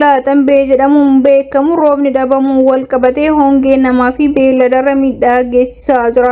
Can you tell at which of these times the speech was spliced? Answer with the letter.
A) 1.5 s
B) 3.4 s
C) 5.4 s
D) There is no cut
D